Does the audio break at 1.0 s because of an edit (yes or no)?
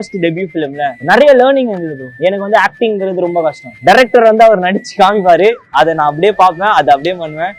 yes